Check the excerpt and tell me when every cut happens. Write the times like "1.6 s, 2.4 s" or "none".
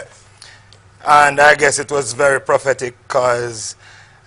1.8 s